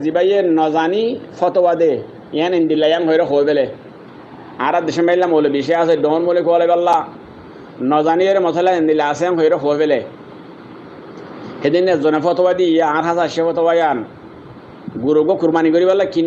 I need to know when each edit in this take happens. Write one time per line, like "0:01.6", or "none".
none